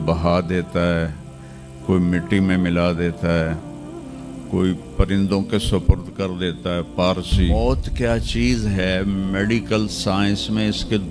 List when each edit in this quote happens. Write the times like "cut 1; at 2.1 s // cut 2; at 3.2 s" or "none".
cut 1; at 7.5 s